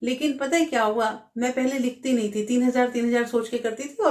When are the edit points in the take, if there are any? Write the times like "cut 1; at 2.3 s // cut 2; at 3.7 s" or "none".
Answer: none